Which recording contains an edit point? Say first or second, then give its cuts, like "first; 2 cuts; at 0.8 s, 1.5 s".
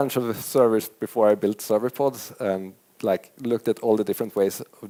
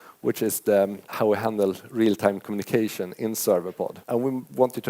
second; 2 cuts; at 1.0 s, 4.0 s